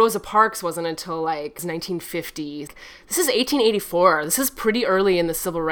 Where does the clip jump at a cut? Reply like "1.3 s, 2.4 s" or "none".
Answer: 1.6 s, 2.6 s

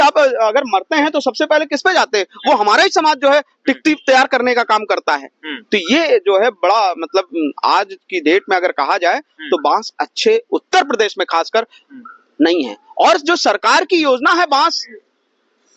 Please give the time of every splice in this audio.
none

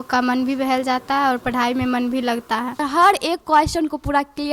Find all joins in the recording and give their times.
2.8 s

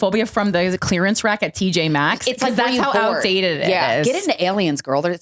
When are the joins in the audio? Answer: none

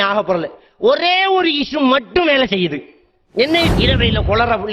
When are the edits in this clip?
3.7 s

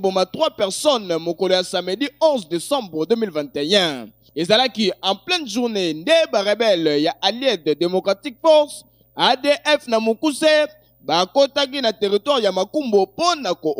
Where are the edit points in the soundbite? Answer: none

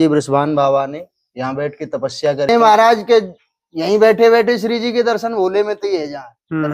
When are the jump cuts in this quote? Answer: 2.5 s

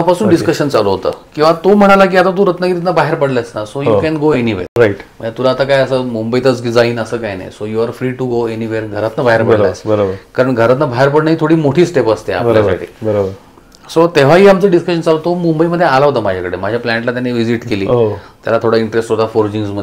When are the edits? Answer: none

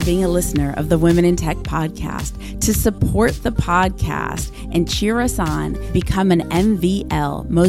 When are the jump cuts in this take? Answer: none

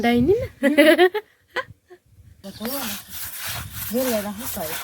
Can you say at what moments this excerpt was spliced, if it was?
2.4 s

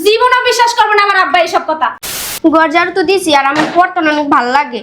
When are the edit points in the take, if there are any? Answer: 2.0 s

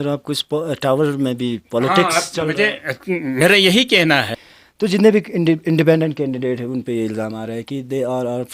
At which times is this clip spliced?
4.4 s

